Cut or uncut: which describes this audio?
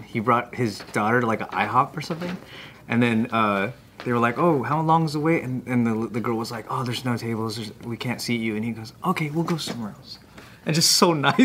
uncut